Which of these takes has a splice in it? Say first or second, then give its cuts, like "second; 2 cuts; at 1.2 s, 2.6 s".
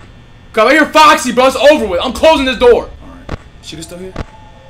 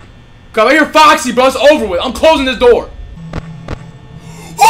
second; 1 cut; at 3.1 s